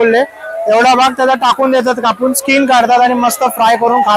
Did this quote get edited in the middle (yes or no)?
no